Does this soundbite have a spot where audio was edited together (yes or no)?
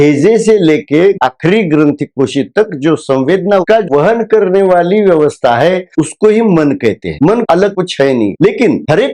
yes